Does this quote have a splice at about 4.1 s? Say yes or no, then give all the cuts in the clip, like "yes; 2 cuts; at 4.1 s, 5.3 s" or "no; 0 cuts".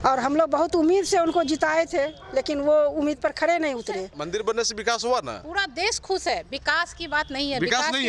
yes; 1 cut; at 4.1 s